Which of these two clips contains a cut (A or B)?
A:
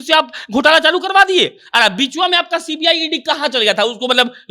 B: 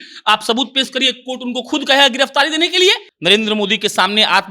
B